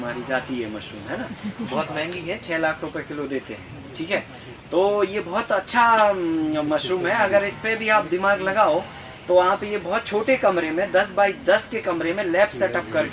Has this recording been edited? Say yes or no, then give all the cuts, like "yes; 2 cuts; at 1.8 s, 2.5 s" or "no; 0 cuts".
no; 0 cuts